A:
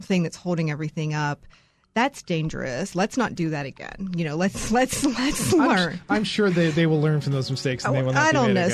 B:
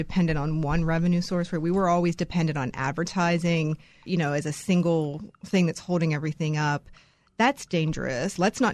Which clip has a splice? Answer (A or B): B